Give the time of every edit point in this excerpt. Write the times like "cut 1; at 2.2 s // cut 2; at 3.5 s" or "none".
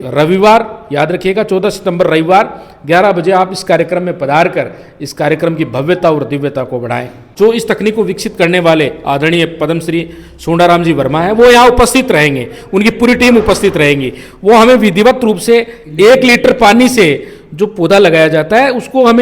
cut 1; at 7.3 s